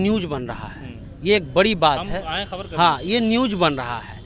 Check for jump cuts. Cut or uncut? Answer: uncut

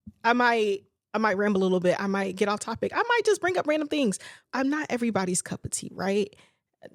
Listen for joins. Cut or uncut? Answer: cut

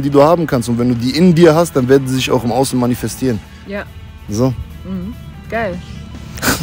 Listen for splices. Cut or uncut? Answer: uncut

